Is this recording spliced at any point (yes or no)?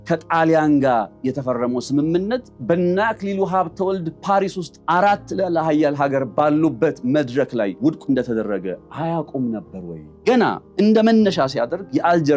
yes